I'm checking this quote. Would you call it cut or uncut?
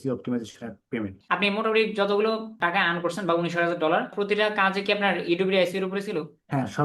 cut